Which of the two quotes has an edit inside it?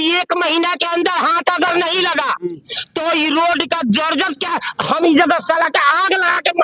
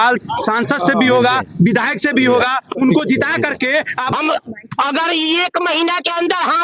second; 1 cut; at 4.1 s

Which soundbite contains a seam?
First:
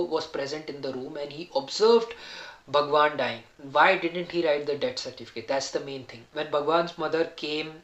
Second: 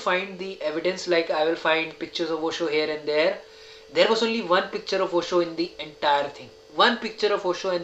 first; 1 cut; at 6.2 s

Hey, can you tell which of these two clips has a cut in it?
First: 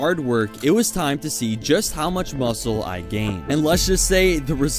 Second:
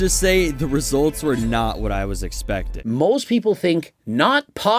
second; 1 cut; at 2.7 s

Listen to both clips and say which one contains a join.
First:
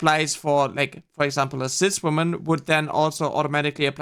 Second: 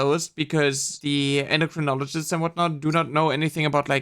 second; 1 cut; at 1.0 s

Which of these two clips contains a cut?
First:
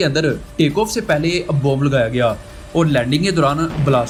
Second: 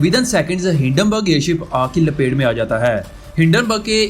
second; 1 cut; at 3.2 s

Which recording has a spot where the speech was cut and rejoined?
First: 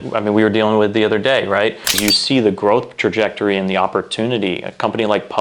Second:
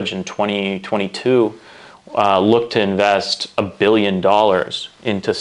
first; 1 cut; at 1.9 s

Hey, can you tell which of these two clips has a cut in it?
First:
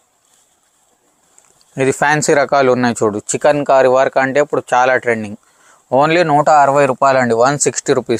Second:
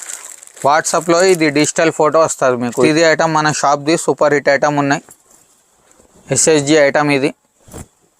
second; 1 cut; at 2.9 s

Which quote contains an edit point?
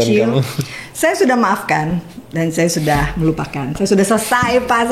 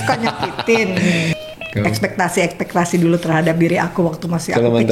second; 1 cut; at 1.3 s

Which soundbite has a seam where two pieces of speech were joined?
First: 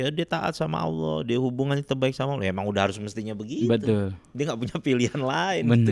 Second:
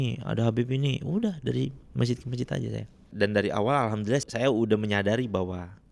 second; 2 cuts; at 3.1 s, 4.2 s

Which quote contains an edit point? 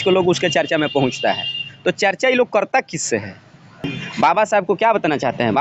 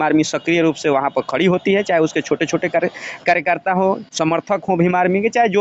first; 1 cut; at 3.8 s

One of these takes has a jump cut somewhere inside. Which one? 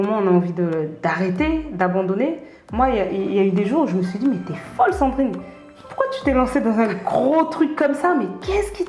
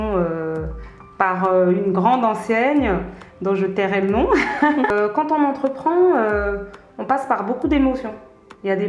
second; 1 cut; at 4.9 s

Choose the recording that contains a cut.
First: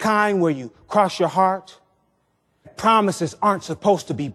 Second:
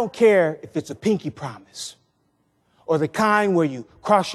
first; 1 cut; at 2.7 s

